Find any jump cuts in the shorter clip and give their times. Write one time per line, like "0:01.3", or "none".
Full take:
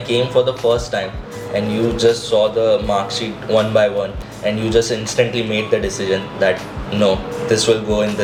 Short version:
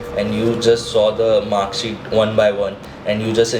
none